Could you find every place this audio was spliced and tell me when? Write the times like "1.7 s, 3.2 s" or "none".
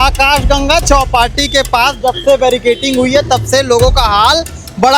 none